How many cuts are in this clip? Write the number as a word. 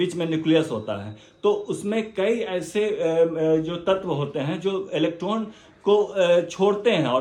zero